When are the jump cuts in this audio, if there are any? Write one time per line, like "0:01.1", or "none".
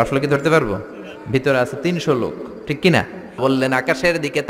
0:03.4

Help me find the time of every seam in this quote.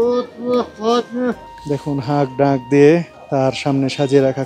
0:01.5
0:03.2

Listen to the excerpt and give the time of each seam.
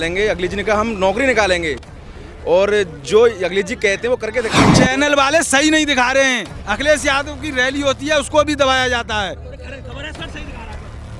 0:04.5

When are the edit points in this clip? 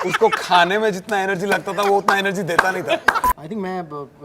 0:03.3

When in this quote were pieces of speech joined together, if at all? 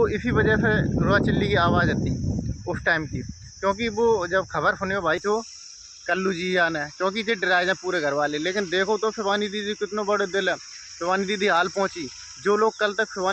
0:05.2

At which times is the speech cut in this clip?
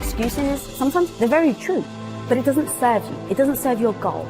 0:02.2

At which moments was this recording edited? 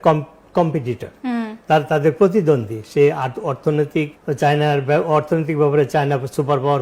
none

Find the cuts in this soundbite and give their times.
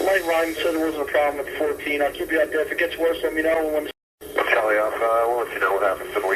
0:03.9

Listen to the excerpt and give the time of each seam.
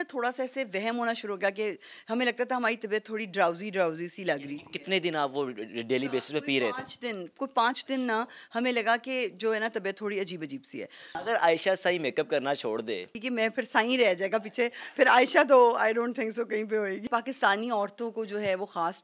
0:11.0
0:13.2
0:17.1

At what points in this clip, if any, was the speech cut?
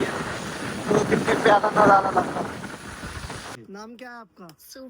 0:03.5

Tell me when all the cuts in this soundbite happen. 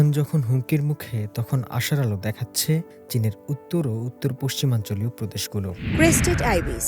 0:05.8

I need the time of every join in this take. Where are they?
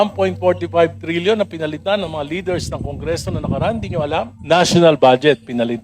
0:04.4

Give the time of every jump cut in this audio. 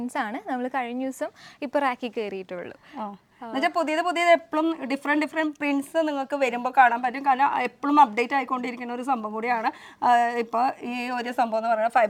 none

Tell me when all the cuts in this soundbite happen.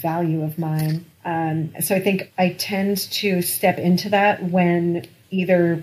none

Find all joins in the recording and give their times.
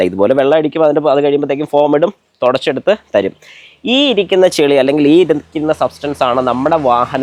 none

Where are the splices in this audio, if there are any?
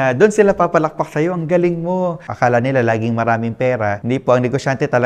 0:02.2
0:04.0

